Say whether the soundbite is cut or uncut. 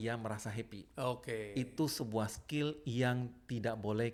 uncut